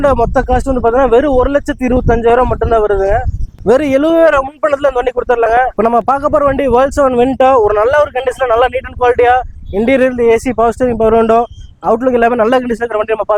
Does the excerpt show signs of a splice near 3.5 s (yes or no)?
yes